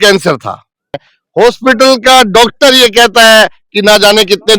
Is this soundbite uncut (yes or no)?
no